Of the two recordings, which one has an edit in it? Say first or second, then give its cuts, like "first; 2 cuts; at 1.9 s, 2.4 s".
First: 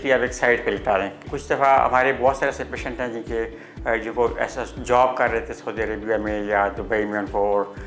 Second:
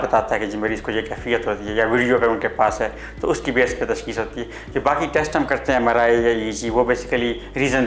first; 1 cut; at 1.2 s